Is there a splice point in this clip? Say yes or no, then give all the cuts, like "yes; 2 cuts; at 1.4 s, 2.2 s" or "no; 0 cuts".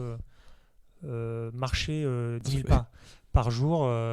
yes; 1 cut; at 2.5 s